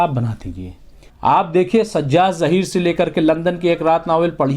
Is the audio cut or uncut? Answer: cut